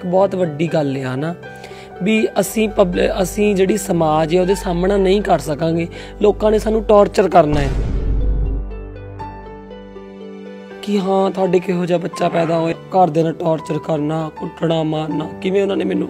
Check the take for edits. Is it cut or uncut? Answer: uncut